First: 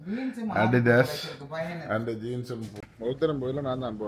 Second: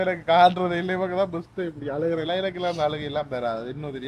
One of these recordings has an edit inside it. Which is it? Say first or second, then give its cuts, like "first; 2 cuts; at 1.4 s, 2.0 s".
first; 1 cut; at 2.9 s